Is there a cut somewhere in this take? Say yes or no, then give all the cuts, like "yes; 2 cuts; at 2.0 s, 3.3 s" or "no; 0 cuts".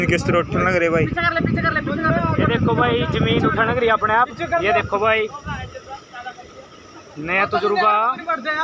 no; 0 cuts